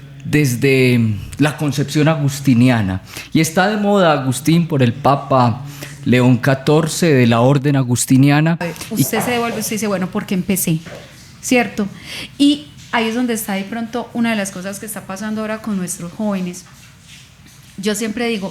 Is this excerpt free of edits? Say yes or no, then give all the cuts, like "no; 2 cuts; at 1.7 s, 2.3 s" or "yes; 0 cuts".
no; 1 cut; at 8.9 s